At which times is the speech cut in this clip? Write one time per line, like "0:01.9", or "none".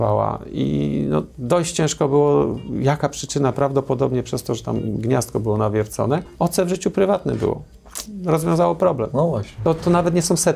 0:06.3
0:09.6